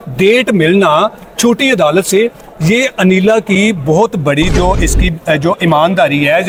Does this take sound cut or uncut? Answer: uncut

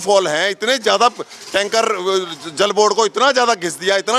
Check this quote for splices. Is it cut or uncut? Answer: uncut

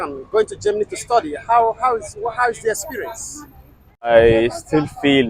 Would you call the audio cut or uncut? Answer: cut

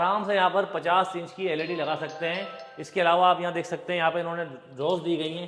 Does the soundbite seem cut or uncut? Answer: uncut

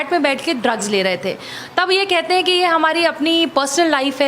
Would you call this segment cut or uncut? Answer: uncut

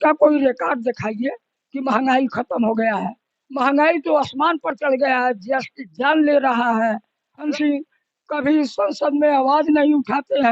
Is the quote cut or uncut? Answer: cut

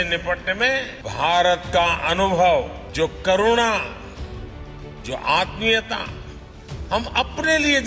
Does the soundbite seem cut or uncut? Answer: cut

